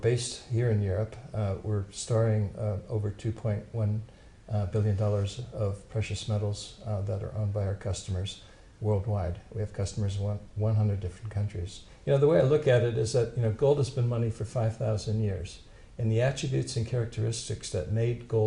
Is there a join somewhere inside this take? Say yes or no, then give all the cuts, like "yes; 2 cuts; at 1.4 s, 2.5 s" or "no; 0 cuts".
yes; 1 cut; at 13.3 s